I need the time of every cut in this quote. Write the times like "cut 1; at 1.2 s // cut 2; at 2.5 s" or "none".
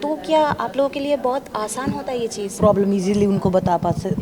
cut 1; at 2.6 s